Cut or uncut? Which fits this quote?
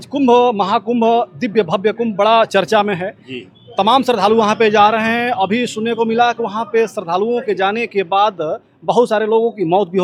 uncut